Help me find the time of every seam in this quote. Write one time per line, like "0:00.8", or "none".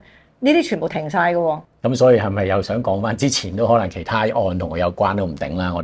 0:01.7